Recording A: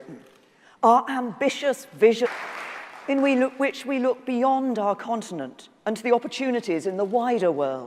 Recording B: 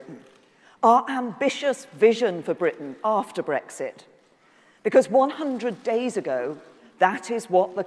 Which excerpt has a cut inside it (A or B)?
B